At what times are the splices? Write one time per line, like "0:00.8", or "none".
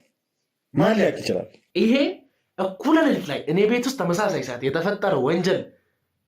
0:01.6